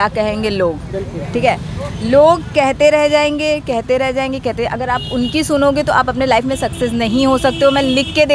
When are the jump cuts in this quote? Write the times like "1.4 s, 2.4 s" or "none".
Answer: none